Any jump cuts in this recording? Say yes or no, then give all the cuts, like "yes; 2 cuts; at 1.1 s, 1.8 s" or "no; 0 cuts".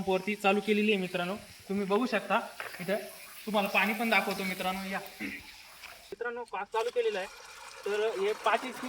yes; 1 cut; at 6.2 s